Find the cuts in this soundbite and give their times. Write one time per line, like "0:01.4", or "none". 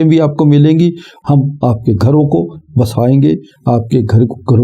0:01.1